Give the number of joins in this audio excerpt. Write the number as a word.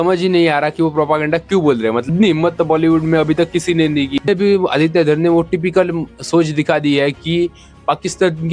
two